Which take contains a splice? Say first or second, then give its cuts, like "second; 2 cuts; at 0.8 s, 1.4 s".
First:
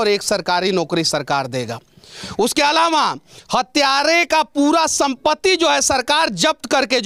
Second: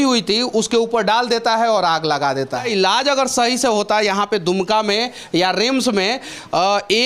second; 1 cut; at 2.7 s